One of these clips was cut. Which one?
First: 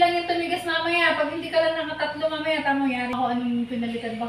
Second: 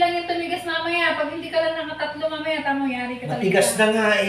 first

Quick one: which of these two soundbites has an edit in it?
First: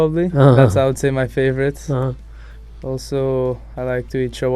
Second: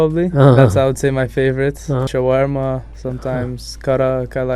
second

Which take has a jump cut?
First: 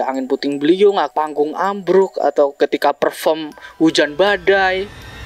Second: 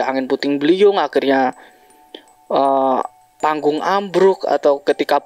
first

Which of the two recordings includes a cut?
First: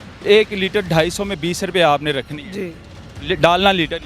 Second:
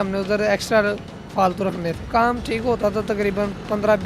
second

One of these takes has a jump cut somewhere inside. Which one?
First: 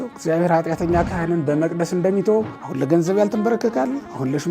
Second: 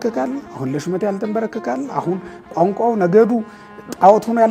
first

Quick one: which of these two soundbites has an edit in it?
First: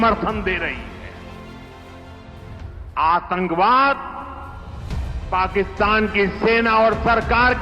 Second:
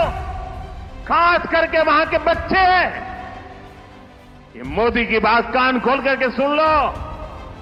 first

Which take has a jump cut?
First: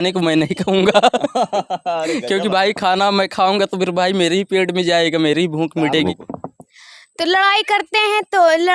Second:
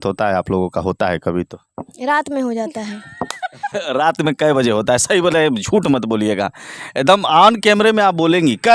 first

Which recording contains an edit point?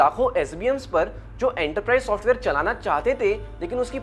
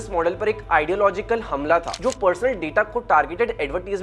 second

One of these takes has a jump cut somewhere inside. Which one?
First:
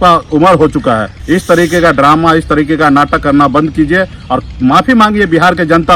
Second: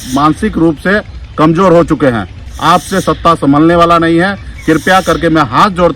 first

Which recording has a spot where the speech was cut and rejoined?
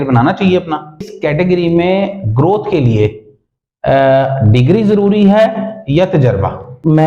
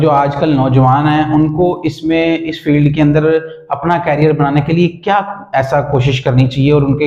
first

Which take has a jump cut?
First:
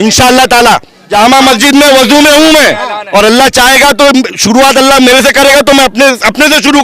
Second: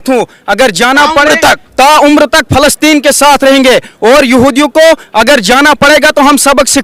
first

